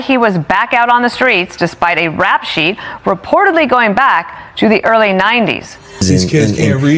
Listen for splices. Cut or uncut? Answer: cut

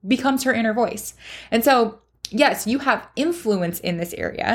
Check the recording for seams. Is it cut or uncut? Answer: uncut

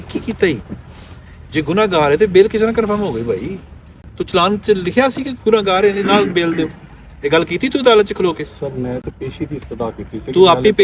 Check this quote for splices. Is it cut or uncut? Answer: uncut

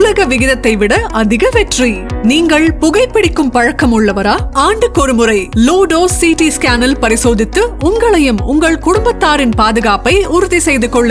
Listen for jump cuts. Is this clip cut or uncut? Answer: uncut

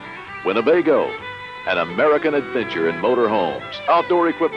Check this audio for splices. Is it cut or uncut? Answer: uncut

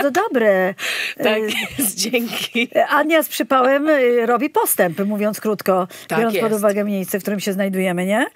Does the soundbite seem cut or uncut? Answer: uncut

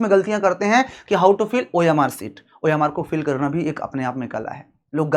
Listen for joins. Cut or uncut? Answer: uncut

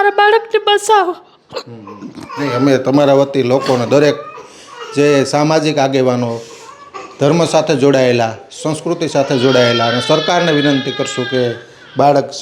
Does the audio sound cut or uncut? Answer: uncut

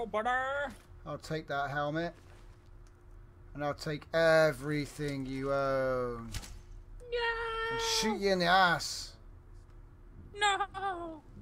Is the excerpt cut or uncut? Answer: uncut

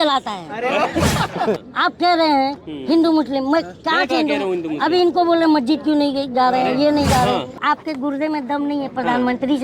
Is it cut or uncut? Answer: cut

